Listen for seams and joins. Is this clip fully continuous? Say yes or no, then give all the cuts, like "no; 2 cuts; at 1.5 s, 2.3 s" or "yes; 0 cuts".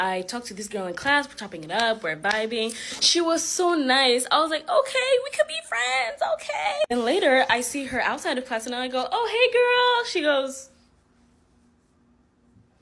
yes; 0 cuts